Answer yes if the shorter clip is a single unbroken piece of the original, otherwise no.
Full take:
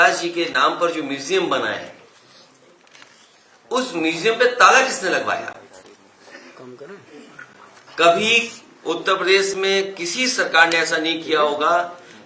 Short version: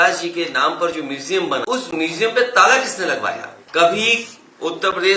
no